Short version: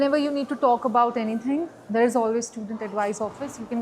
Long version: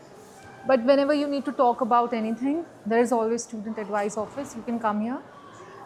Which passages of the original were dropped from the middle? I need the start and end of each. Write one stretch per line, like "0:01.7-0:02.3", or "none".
none